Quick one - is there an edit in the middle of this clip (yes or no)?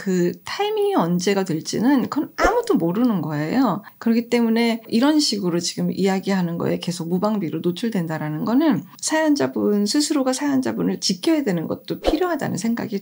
yes